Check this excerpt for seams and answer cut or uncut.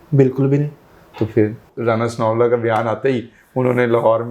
cut